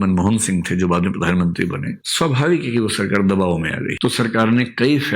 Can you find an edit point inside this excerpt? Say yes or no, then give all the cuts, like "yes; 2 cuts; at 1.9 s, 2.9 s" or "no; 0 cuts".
yes; 1 cut; at 3.9 s